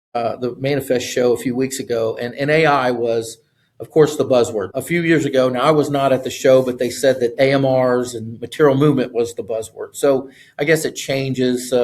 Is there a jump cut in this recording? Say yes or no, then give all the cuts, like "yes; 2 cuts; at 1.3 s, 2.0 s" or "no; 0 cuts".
no; 0 cuts